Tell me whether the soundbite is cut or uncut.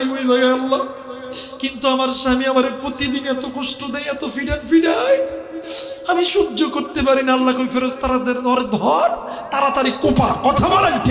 uncut